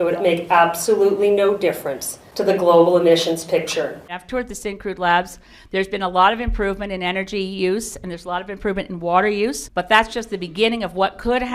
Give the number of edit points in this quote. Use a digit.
2